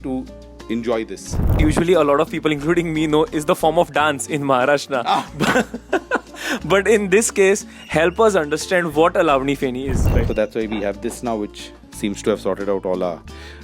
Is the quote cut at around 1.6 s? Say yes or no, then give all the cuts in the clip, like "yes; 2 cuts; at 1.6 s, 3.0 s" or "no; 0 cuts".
yes; 2 cuts; at 1.6 s, 9.9 s